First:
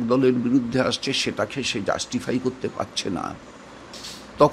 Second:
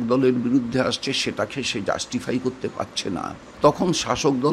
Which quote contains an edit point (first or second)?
second